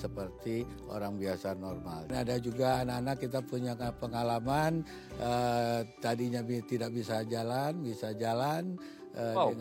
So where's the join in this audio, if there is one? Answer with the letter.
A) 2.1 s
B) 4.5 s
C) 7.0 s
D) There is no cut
A